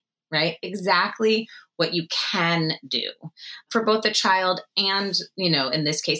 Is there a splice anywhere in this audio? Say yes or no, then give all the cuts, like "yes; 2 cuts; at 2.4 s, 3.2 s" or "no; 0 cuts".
yes; 1 cut; at 3.7 s